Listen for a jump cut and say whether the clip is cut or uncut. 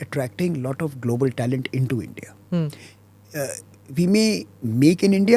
uncut